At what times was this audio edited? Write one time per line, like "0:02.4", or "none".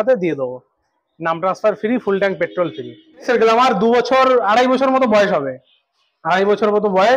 0:03.2